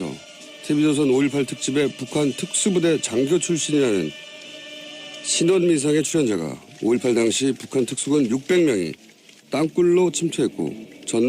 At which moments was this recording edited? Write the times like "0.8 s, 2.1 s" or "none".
6.0 s